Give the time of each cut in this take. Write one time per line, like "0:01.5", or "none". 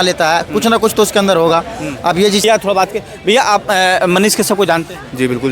0:02.4

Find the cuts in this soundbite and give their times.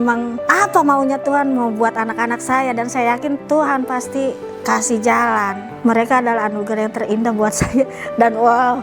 none

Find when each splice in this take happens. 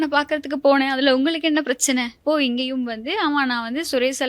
0:02.1

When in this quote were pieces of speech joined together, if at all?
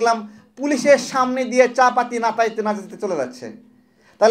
none

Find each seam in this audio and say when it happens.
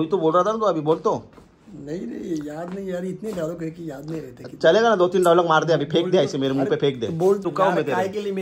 0:07.4

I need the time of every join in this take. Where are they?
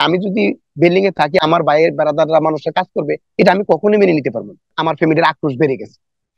0:01.4
0:04.7

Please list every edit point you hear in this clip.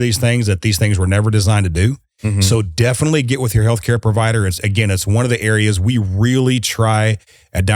none

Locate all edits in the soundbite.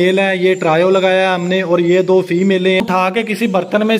0:02.8

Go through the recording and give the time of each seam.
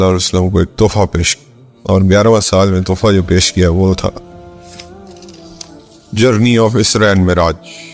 0:04.2
0:06.0

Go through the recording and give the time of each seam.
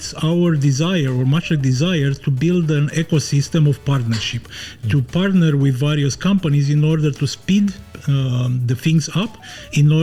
none

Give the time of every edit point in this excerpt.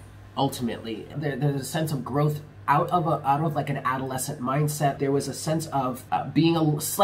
0:01.2
0:05.0
0:06.0

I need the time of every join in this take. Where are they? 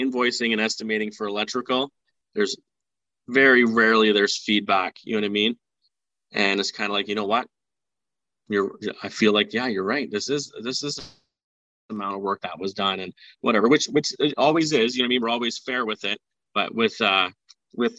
none

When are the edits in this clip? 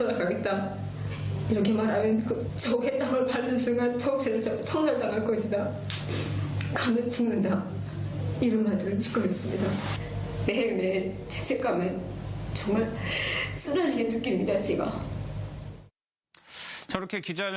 0:04.2

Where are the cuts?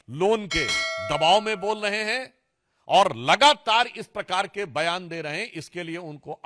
none

